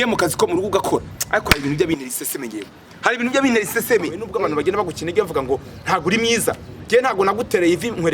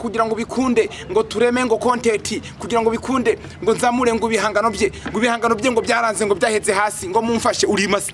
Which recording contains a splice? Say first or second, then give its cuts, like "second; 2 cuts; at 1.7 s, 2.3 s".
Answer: first; 1 cut; at 4.3 s